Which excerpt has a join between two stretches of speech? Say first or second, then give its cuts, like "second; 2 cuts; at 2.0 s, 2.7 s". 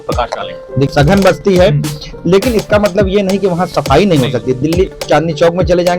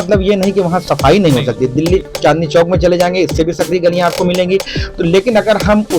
first; 1 cut; at 0.9 s